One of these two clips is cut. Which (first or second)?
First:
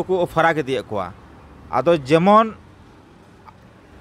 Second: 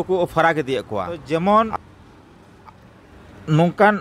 second